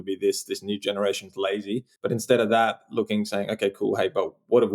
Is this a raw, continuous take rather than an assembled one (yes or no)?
no